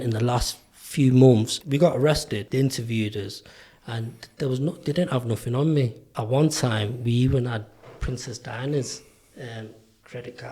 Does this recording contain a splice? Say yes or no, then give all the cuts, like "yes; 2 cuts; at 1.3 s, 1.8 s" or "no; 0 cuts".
yes; 3 cuts; at 1.6 s, 2.4 s, 6.1 s